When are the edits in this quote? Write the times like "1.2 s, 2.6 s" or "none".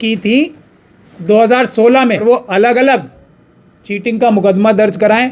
2.2 s